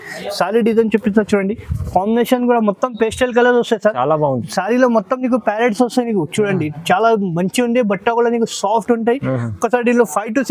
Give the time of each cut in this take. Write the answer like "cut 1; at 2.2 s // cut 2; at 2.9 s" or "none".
none